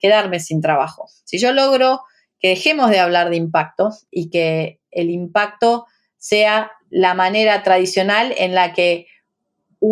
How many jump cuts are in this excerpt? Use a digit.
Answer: 2